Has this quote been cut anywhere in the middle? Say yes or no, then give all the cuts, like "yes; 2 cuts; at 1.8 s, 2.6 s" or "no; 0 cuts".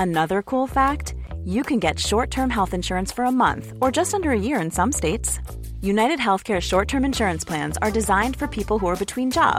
no; 0 cuts